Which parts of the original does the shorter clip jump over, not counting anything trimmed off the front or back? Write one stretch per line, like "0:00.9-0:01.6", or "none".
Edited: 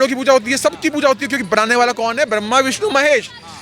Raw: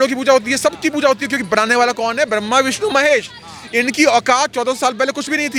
none